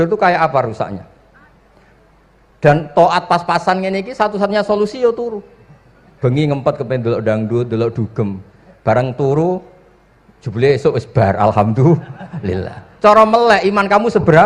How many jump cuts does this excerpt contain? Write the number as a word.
zero